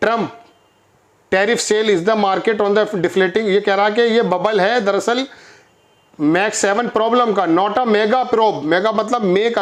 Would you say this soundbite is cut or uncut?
uncut